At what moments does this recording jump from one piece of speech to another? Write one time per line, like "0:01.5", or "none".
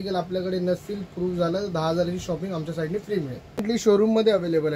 0:03.6